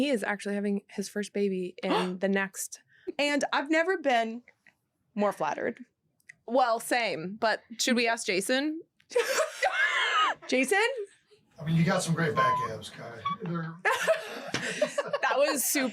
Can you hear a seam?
yes; 1 cut; at 3.0 s

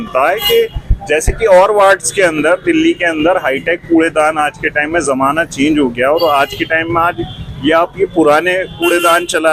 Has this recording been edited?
no; 0 cuts

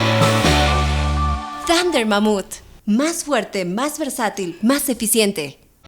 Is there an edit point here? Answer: yes; 1 cut; at 1.5 s

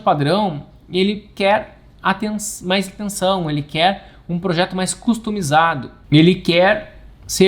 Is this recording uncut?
no; 1 cut; at 5.9 s

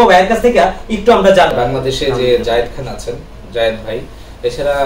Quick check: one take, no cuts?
no; 1 cut; at 1.5 s

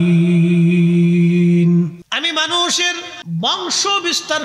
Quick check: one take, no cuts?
no; 2 cuts; at 2.0 s, 3.1 s

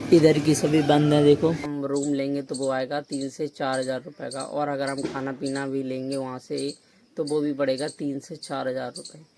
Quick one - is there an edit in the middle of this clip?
yes; 1 cut; at 1.6 s

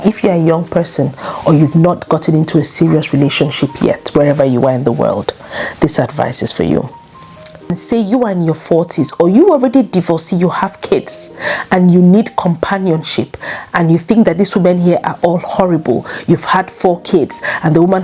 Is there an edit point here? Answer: yes; 1 cut; at 7.7 s

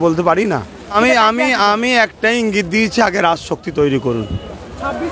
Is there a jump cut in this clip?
yes; 1 cut; at 0.9 s

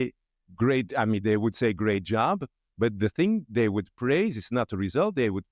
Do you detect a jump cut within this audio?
no; 0 cuts

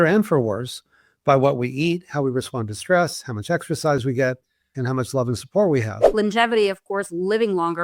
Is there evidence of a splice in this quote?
yes; 2 cuts; at 4.8 s, 6.1 s

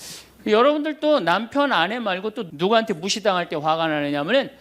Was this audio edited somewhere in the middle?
yes; 1 cut; at 2.4 s

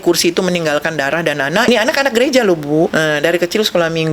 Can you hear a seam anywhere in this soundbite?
yes; 2 cuts; at 1.7 s, 2.9 s

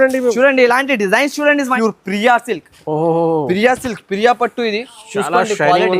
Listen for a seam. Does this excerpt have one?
yes; 1 cut; at 1.7 s

